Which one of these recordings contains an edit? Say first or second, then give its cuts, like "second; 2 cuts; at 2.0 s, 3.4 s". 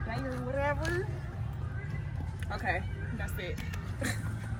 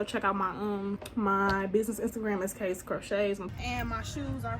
second; 2 cuts; at 1.0 s, 3.5 s